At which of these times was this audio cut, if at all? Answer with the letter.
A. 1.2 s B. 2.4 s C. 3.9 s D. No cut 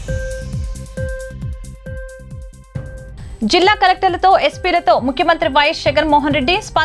B